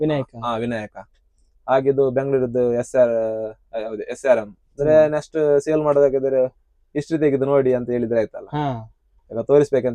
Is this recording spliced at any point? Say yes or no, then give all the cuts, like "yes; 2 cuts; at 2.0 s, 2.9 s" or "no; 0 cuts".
yes; 1 cut; at 4.6 s